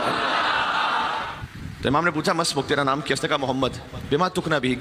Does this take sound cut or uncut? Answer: cut